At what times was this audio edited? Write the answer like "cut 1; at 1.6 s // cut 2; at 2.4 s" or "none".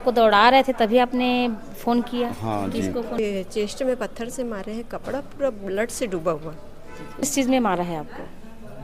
cut 1; at 3.2 s // cut 2; at 7.2 s

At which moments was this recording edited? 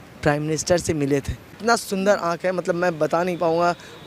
cut 1; at 1.5 s

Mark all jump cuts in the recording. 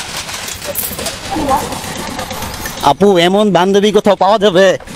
none

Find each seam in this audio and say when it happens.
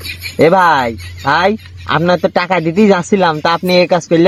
none

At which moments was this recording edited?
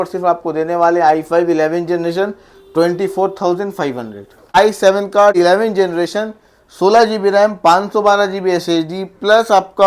cut 1; at 4.6 s // cut 2; at 5.4 s

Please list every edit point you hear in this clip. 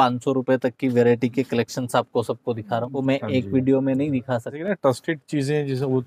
cut 1; at 2.9 s // cut 2; at 4.6 s

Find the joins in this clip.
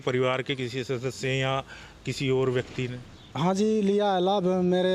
none

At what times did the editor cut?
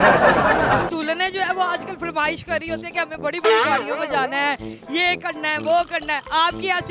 cut 1; at 0.9 s

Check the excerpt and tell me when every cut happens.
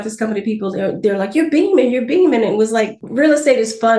cut 1; at 3.0 s

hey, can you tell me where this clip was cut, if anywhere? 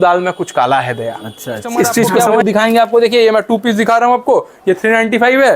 cut 1; at 2.2 s

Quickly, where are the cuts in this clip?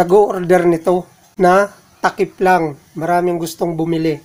cut 1; at 1.2 s

